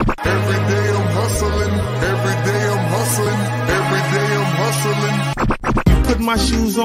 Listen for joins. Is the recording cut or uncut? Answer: cut